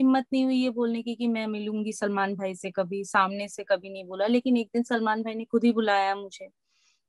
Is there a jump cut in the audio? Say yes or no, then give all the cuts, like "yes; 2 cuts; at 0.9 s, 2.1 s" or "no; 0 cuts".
no; 0 cuts